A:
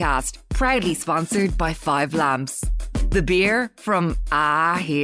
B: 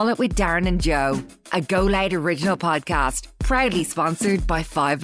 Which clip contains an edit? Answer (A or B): B